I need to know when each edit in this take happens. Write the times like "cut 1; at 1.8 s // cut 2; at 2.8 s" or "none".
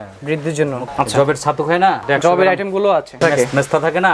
cut 1; at 0.8 s // cut 2; at 2.0 s // cut 3; at 3.2 s